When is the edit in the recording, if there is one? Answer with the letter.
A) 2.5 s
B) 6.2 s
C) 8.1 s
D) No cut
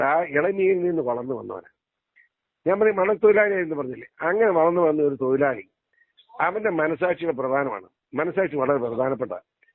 D